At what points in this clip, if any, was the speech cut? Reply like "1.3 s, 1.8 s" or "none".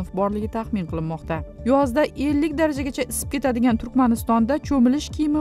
1.5 s